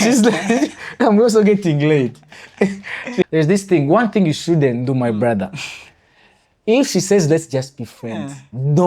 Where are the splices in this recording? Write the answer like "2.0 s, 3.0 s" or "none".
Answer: 3.3 s